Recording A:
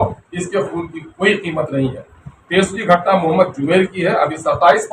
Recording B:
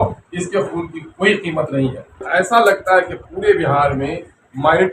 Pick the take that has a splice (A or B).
B